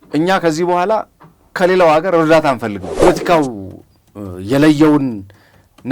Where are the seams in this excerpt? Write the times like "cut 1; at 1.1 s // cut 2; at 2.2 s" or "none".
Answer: cut 1; at 3.0 s